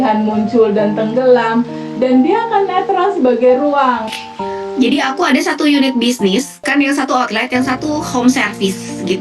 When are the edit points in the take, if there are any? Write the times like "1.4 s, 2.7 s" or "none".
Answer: 4.1 s